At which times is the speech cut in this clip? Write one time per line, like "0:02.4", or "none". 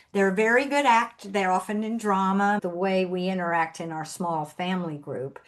0:02.6

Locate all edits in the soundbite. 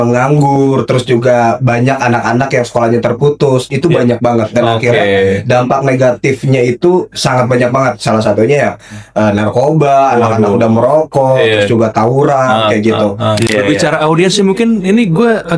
0:13.5

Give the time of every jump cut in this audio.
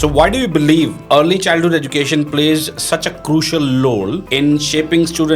0:01.0
0:04.2

